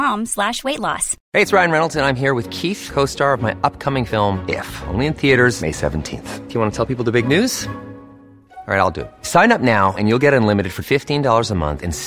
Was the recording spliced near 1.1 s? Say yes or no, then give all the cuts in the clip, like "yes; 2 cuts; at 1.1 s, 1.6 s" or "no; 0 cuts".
yes; 1 cut; at 1.1 s